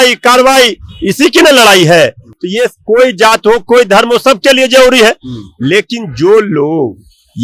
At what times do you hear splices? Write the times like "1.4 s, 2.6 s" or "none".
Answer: none